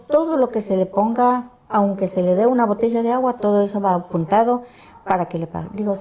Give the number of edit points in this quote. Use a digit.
0